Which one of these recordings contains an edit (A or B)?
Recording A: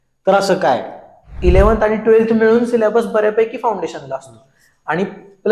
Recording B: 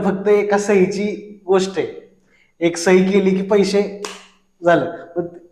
A